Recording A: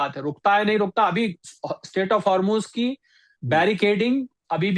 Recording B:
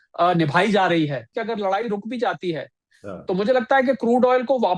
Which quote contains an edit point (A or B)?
B